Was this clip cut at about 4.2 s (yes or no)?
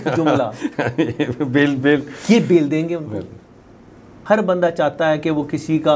yes